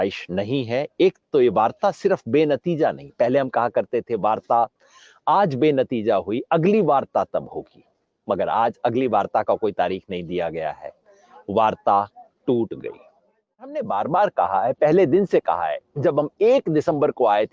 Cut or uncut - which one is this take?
cut